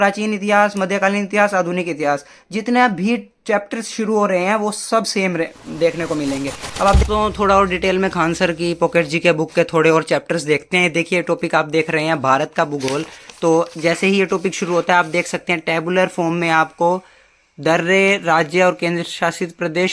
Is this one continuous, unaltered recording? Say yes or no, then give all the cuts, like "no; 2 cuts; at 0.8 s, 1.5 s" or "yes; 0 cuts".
no; 1 cut; at 7.0 s